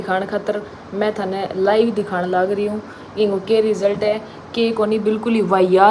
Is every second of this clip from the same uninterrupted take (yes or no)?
yes